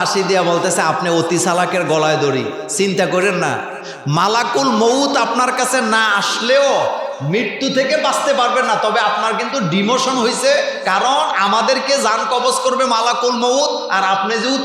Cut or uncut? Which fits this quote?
uncut